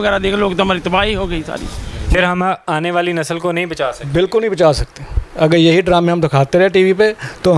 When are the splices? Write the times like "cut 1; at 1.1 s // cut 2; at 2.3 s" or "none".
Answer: cut 1; at 2.1 s

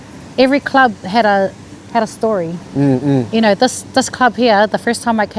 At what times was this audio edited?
none

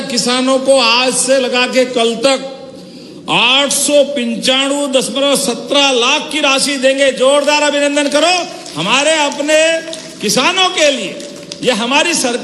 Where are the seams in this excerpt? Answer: none

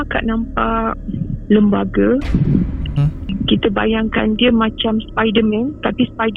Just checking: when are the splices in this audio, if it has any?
cut 1; at 3.3 s

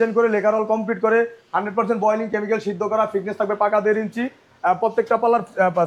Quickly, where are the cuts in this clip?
none

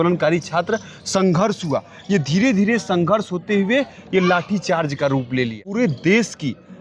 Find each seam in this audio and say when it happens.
cut 1; at 5.6 s

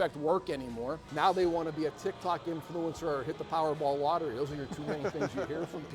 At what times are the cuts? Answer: cut 1; at 1.0 s

